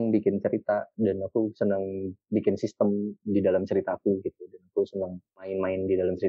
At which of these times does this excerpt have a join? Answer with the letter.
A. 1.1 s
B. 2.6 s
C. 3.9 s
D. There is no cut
D